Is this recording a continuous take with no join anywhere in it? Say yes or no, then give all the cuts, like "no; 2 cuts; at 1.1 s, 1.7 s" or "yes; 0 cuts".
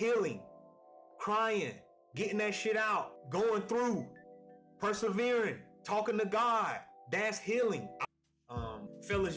no; 1 cut; at 7.9 s